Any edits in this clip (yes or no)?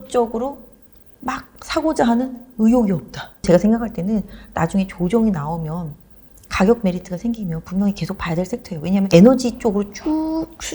yes